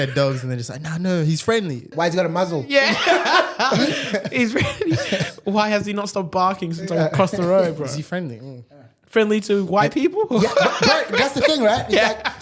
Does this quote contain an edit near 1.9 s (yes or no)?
yes